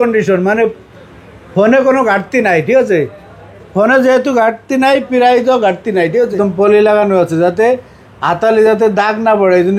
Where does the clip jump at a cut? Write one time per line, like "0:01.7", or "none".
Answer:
0:06.3